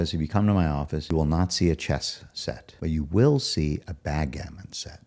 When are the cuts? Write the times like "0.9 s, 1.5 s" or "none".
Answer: 1.0 s, 2.7 s